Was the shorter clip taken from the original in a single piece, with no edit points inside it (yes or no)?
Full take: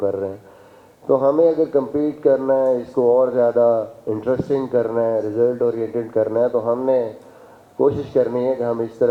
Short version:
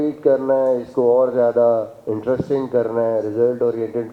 yes